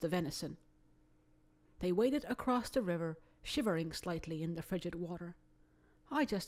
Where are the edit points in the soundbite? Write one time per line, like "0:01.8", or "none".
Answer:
none